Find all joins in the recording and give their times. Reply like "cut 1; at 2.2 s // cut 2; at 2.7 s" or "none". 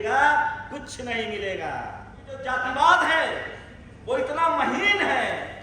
cut 1; at 2.4 s